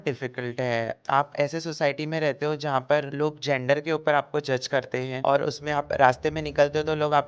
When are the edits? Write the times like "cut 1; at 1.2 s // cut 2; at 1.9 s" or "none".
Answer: cut 1; at 1.0 s // cut 2; at 3.1 s // cut 3; at 5.1 s